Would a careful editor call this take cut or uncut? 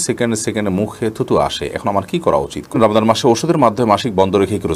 cut